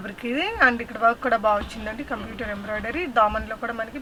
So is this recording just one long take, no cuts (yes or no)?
yes